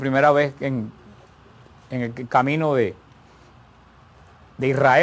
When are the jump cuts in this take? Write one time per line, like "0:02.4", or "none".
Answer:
0:02.1